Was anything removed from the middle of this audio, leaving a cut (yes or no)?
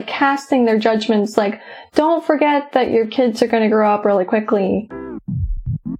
yes